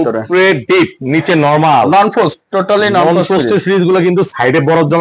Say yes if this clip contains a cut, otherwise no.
no